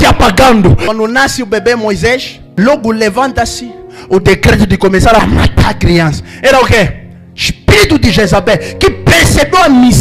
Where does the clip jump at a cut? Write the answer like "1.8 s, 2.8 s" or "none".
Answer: 0.8 s, 2.4 s, 5.2 s